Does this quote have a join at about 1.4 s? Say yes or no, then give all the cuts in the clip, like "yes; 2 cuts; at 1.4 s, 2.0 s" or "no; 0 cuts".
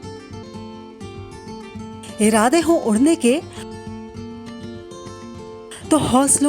yes; 1 cut; at 1.4 s